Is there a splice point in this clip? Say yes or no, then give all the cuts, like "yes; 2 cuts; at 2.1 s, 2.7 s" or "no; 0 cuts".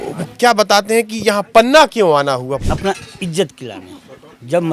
yes; 1 cut; at 2.5 s